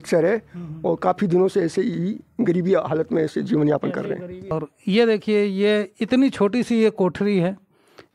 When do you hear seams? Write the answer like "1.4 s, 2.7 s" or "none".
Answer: none